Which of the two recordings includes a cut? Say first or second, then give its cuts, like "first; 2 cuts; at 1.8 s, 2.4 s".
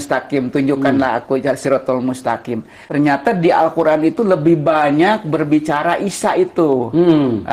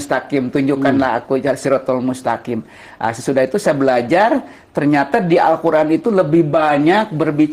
first; 1 cut; at 2.8 s